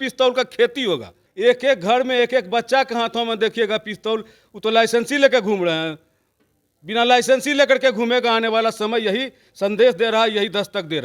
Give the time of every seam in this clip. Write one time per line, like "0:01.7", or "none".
0:01.2